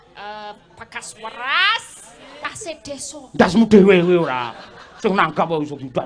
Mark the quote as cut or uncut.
cut